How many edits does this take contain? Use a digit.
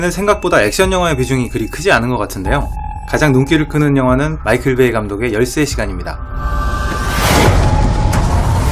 1